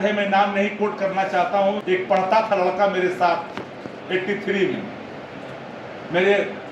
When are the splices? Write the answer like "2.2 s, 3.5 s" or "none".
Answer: 1.9 s